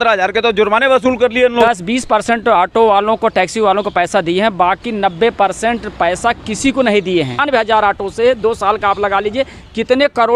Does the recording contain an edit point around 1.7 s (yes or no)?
yes